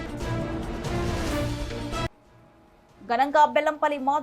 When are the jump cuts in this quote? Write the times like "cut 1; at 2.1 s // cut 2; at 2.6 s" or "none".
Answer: cut 1; at 2.2 s